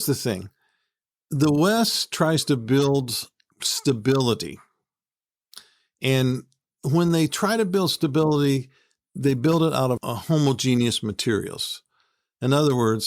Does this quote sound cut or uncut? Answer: uncut